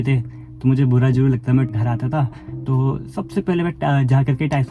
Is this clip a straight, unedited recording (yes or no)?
no